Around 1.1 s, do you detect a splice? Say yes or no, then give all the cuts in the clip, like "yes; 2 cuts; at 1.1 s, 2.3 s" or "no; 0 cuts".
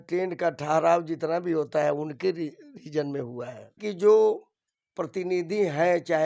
no; 1 cut; at 3.8 s